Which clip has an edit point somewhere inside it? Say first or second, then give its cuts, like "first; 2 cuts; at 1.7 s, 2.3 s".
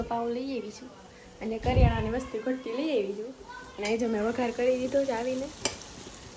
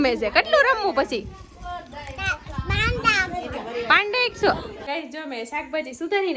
second; 1 cut; at 4.8 s